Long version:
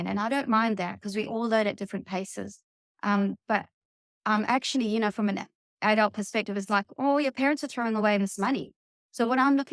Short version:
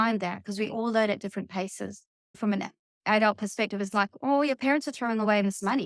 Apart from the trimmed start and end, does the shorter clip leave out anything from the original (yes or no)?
yes